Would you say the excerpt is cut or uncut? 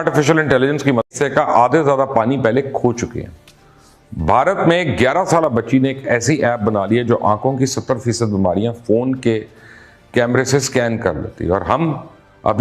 cut